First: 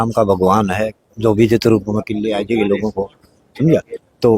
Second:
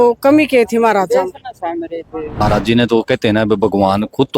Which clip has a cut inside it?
second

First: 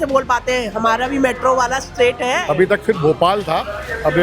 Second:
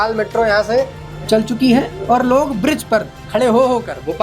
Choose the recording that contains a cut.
first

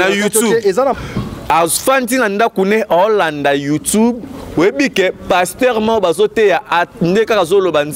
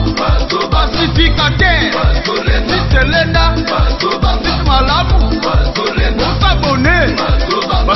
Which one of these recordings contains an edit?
first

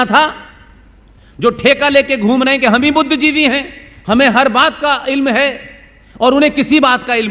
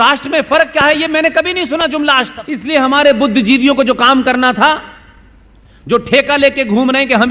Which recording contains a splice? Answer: second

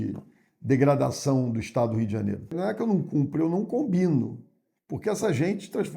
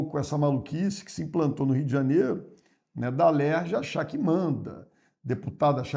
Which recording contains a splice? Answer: first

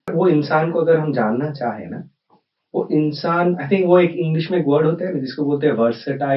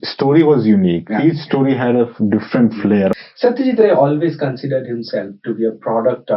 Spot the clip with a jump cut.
second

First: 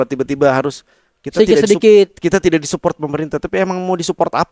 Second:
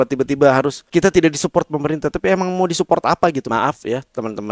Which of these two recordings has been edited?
second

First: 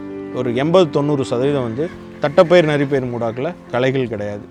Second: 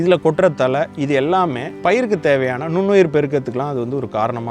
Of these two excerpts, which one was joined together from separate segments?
second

